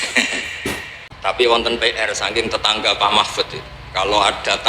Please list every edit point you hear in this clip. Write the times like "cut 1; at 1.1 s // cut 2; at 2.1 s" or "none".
cut 1; at 0.9 s